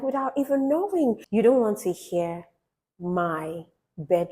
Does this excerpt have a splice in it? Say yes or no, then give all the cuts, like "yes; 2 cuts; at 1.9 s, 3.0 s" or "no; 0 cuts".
yes; 1 cut; at 1.2 s